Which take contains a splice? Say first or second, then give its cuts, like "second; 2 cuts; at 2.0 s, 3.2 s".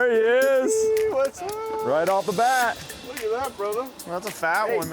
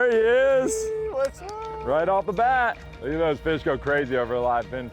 second; 1 cut; at 2.9 s